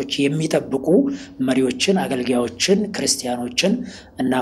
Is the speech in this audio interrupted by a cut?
no; 0 cuts

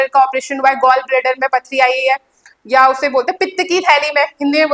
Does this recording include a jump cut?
no; 0 cuts

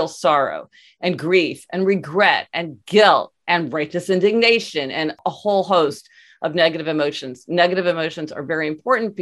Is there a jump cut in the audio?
yes; 1 cut; at 5.2 s

